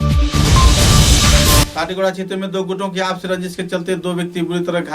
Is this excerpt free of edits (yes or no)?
no